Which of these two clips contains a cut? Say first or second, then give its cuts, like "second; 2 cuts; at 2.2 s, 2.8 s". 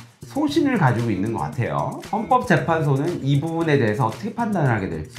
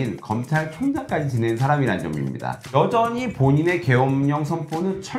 second; 1 cut; at 2.6 s